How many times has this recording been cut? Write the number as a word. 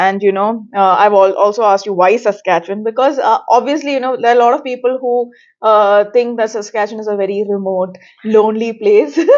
zero